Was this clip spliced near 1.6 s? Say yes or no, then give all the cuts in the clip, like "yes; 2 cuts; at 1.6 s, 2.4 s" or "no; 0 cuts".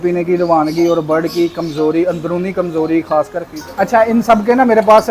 no; 1 cut; at 3.4 s